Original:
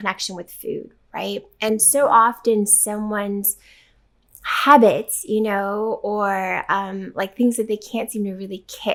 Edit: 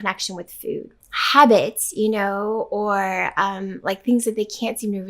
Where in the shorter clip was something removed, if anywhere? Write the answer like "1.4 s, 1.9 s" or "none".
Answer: 1.0 s

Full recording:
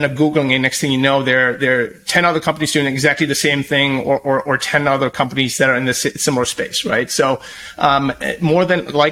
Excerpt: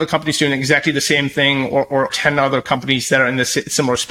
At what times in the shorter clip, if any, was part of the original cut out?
2.1 s

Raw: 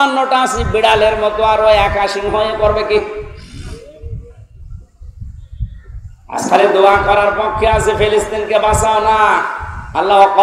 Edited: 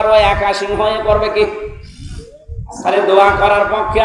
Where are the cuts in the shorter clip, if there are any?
2.8 s

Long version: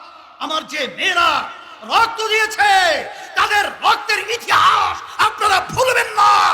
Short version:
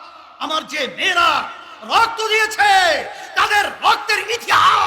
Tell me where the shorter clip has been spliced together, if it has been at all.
none

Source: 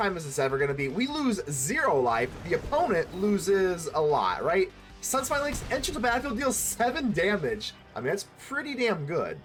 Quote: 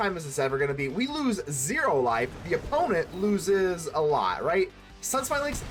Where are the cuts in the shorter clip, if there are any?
none

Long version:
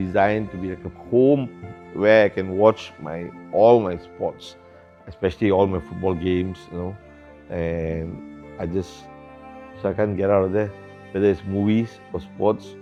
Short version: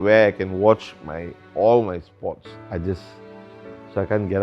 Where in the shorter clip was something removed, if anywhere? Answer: 2.5 s

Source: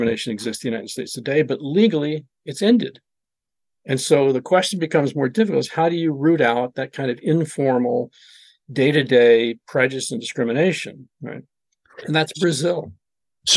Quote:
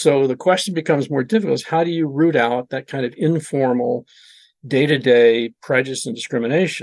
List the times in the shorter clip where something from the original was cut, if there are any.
none

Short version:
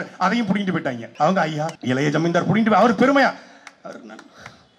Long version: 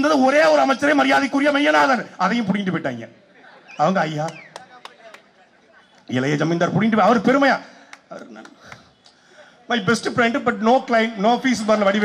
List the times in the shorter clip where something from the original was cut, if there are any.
1.0 s, 1.8 s

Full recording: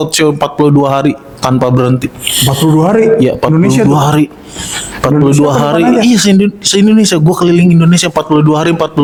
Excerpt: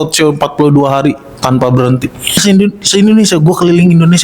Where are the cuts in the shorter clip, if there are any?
2.4 s

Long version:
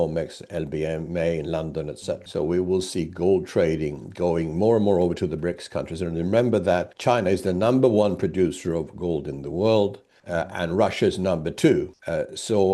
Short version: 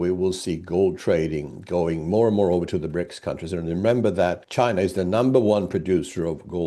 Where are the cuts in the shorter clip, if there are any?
none

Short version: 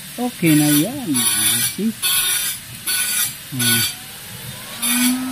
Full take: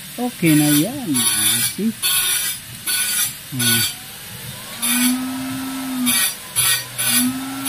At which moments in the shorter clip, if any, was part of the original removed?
none

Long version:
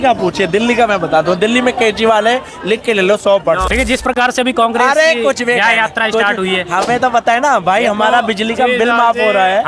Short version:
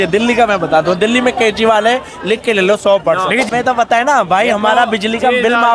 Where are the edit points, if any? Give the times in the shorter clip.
3.5 s

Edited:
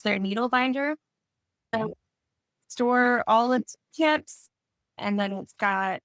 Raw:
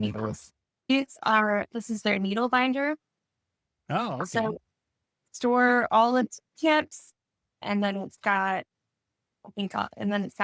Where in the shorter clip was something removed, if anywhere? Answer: 1.7 s

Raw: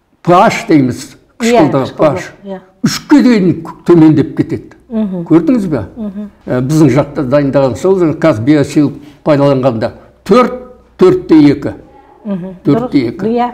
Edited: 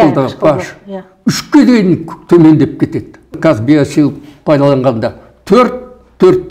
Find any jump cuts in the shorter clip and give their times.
3.4 s

